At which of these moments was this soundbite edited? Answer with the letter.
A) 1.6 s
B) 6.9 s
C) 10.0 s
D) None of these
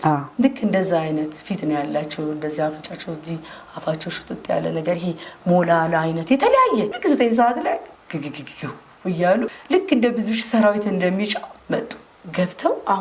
B